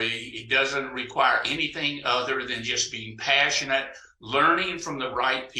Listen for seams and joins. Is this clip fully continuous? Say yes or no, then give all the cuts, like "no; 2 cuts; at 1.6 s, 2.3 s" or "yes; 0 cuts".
yes; 0 cuts